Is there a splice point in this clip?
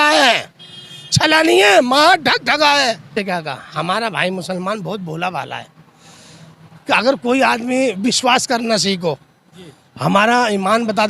yes; 1 cut; at 3.1 s

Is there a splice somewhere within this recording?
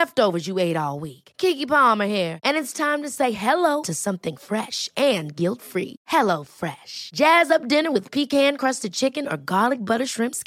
no; 0 cuts

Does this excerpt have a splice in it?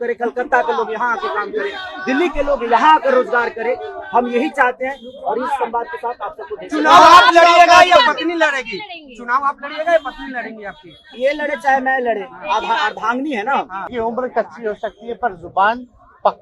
yes; 1 cut; at 13.8 s

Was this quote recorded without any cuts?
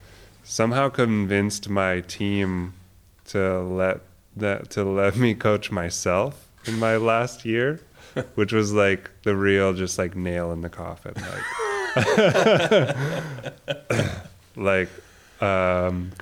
yes; 0 cuts

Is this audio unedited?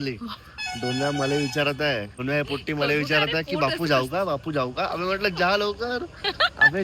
no; 1 cut; at 2.1 s

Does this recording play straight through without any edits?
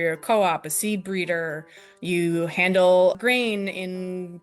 no; 1 cut; at 3.2 s

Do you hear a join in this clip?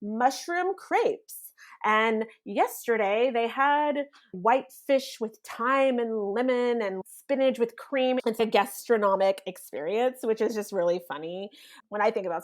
yes; 2 cuts; at 7.0 s, 8.3 s

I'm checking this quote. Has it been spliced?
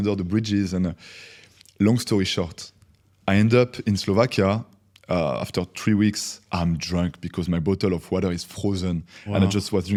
no; 0 cuts

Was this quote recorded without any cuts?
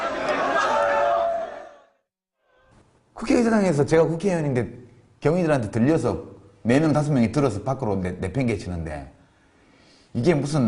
no; 1 cut; at 2.8 s

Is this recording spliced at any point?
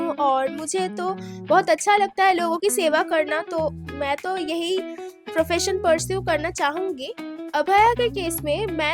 yes; 1 cut; at 7.4 s

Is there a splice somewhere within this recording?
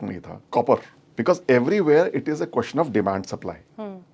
yes; 1 cut; at 1.0 s

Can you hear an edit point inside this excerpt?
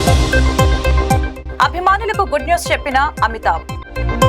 yes; 1 cut; at 1.1 s

